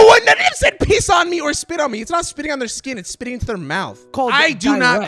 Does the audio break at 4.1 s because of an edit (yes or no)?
yes